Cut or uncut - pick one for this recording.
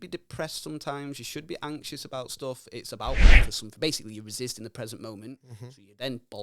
cut